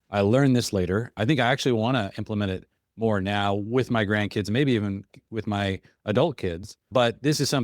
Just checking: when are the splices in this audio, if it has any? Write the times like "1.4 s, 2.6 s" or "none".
1.2 s, 6.9 s